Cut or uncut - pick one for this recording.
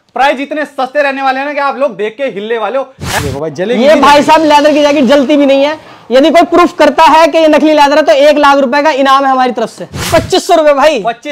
cut